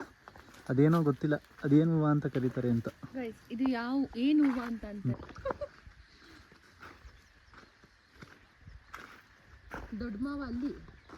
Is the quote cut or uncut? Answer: cut